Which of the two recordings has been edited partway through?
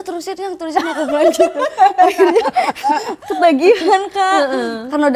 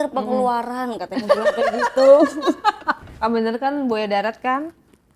second; 1 cut; at 3.1 s

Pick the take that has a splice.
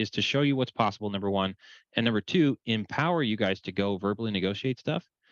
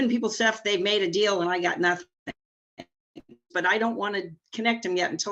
second; 2 cuts; at 3.5 s, 4.4 s

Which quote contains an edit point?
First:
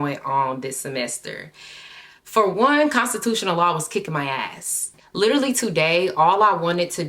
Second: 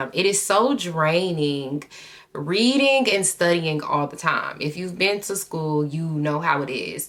first; 1 cut; at 4.9 s

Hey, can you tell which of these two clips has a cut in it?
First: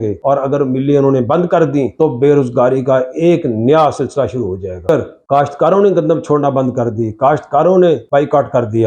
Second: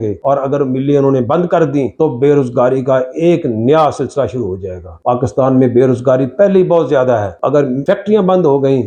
first; 1 cut; at 4.9 s

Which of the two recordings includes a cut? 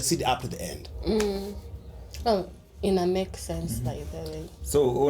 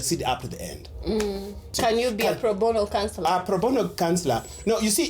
second; 1 cut; at 1.7 s

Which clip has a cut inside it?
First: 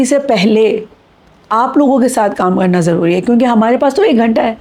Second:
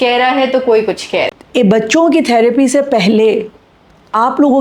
second; 1 cut; at 1.4 s

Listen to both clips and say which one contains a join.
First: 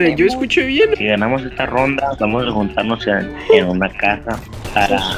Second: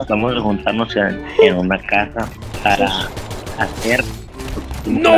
first; 1 cut; at 1.0 s

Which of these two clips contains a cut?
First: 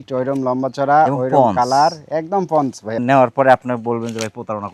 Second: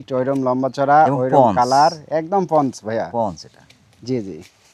first; 1 cut; at 2.9 s

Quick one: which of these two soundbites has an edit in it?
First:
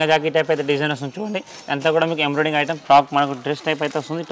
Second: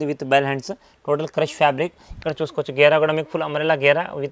first; 1 cut; at 2.8 s

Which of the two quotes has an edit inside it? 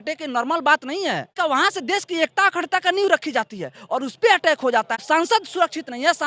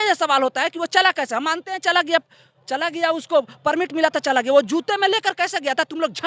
first; 2 cuts; at 1.4 s, 5.0 s

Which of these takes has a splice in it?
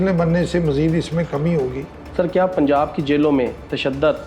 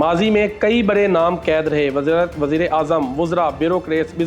first; 1 cut; at 2.0 s

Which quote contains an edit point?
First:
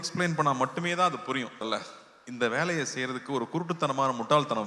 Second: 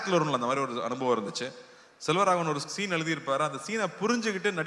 first; 1 cut; at 1.7 s

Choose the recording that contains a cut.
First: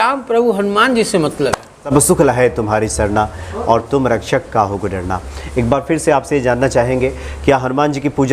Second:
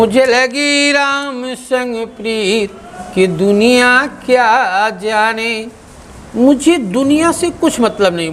first; 1 cut; at 1.9 s

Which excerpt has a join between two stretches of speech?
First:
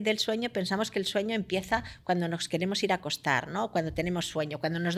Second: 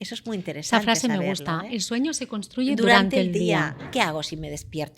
second; 1 cut; at 3.9 s

